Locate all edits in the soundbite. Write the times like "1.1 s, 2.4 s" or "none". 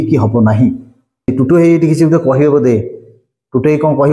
1.3 s